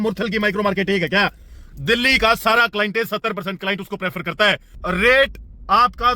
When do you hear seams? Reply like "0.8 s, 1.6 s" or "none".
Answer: 4.7 s